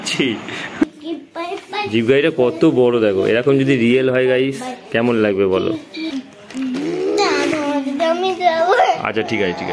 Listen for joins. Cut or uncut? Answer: cut